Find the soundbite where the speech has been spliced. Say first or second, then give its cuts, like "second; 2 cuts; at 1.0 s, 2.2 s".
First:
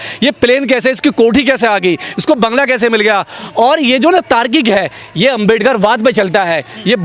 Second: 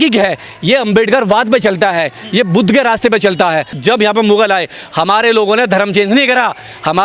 second; 1 cut; at 3.7 s